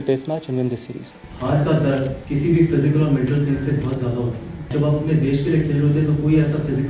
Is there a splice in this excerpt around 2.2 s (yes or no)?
yes